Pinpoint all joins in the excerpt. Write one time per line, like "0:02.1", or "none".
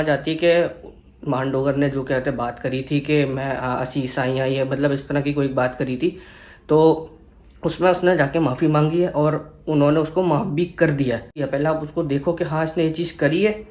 0:11.4